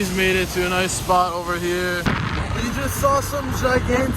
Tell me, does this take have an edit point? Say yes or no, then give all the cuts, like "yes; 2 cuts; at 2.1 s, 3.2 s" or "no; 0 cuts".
yes; 1 cut; at 2.1 s